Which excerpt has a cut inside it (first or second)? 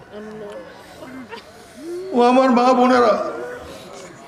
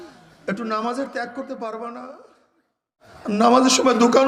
second